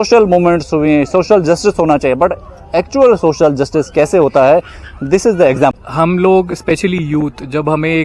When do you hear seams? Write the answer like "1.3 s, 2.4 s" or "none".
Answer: 5.7 s